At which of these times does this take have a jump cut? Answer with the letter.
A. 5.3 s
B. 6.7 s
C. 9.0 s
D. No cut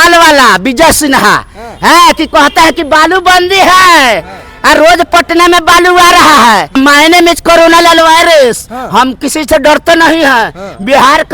B